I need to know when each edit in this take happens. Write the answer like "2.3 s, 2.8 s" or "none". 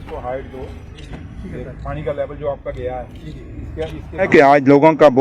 4.3 s